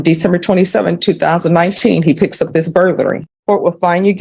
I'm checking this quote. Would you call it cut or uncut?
cut